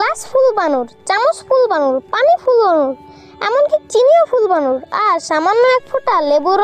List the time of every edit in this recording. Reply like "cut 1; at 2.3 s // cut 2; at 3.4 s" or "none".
none